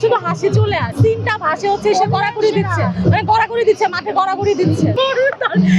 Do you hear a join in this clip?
yes; 2 cuts; at 0.9 s, 4.9 s

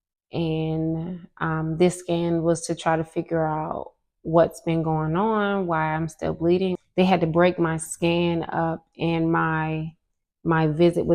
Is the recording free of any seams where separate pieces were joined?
no; 1 cut; at 6.8 s

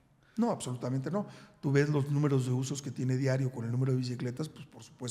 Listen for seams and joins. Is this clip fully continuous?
yes; 0 cuts

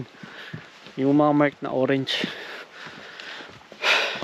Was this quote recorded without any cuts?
yes; 0 cuts

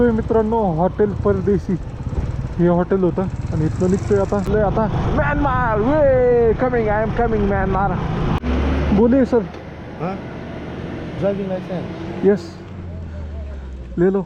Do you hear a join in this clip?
yes; 2 cuts; at 4.5 s, 8.4 s

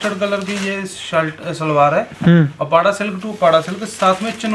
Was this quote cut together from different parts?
no; 0 cuts

